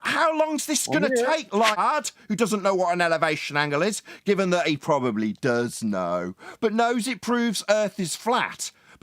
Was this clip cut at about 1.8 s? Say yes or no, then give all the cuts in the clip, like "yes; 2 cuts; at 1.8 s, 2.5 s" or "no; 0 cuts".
yes; 1 cut; at 1.8 s